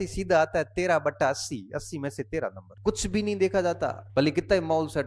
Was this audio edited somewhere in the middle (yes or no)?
yes